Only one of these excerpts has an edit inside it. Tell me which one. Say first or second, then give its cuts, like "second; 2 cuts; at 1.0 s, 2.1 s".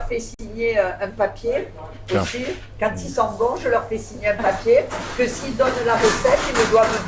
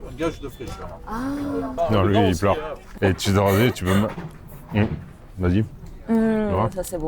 second; 3 cuts; at 1.7 s, 3.0 s, 5.9 s